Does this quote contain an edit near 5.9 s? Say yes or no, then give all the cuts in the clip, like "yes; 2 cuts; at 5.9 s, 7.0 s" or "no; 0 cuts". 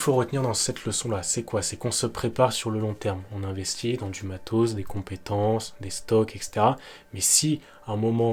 no; 0 cuts